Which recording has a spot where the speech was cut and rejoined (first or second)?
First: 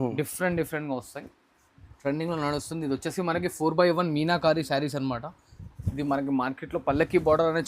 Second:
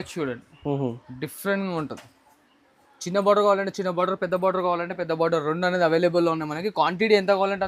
first